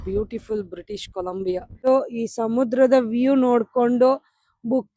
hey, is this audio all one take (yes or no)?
no